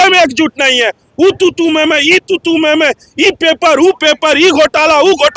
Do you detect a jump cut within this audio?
no; 0 cuts

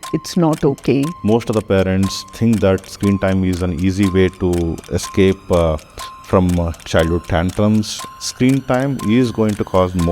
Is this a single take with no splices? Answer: no; 2 cuts; at 1.1 s, 8.0 s

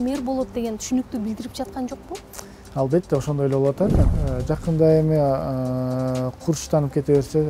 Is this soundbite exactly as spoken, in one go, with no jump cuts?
no; 1 cut; at 4.1 s

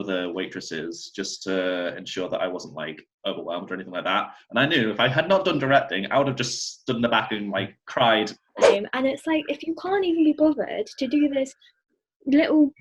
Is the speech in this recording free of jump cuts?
no; 1 cut; at 8.7 s

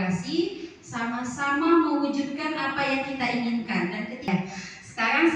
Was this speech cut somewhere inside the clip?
yes; 1 cut; at 4.3 s

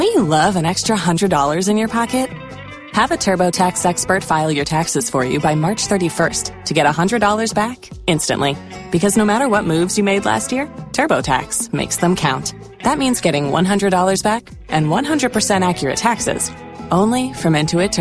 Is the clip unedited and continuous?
yes; 0 cuts

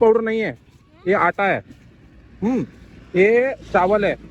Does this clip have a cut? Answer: no; 0 cuts

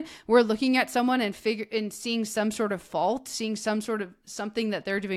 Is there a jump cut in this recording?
no; 0 cuts

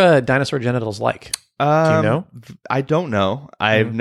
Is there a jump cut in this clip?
no; 0 cuts

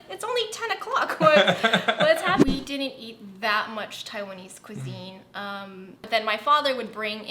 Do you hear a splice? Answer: yes; 2 cuts; at 2.4 s, 5.9 s

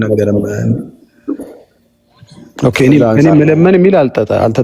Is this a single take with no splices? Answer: yes; 0 cuts

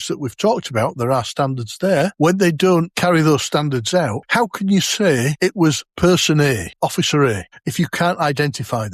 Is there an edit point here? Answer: yes; 6 cuts; at 2.1 s, 2.9 s, 4.2 s, 5.8 s, 6.7 s, 7.5 s

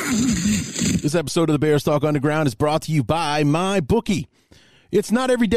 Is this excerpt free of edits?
no; 1 cut; at 1.0 s

